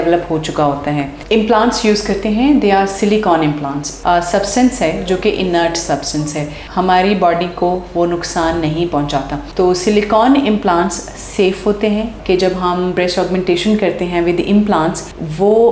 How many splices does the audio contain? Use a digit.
3